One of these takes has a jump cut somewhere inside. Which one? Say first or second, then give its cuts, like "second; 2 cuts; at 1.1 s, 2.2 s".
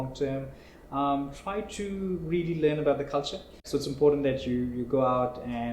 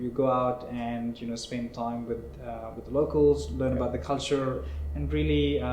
first; 1 cut; at 3.6 s